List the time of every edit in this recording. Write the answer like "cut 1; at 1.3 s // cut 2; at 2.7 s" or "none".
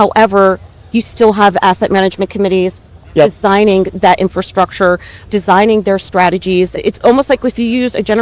cut 1; at 3.1 s // cut 2; at 5.2 s // cut 3; at 6.7 s

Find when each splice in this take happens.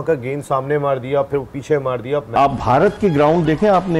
cut 1; at 2.3 s

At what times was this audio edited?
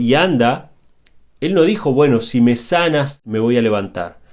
cut 1; at 3.2 s

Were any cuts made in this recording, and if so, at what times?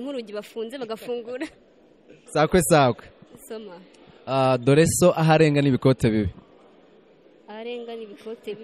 cut 1; at 2.1 s

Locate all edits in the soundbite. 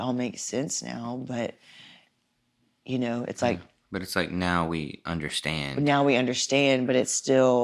none

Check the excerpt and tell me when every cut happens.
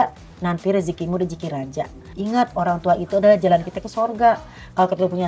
cut 1; at 2.0 s

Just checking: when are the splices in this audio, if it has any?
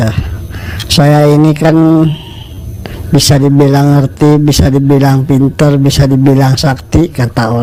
none

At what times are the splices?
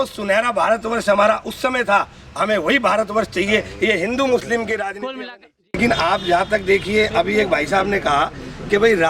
cut 1; at 5.8 s

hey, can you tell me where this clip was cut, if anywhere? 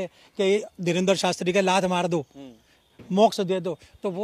none

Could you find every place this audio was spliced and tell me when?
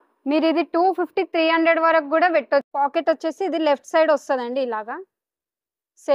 cut 1; at 2.7 s

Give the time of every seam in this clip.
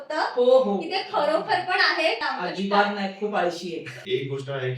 cut 1; at 2.2 s // cut 2; at 3.9 s

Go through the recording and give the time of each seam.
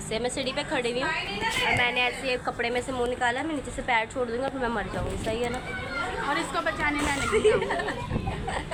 none

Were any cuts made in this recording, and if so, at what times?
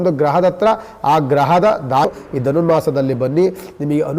cut 1; at 2.1 s

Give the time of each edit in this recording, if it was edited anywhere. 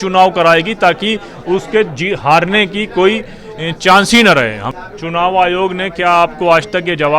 cut 1; at 4.7 s

